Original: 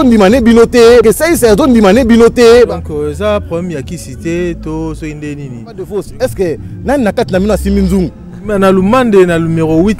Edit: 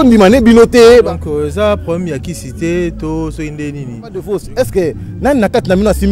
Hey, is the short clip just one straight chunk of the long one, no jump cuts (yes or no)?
no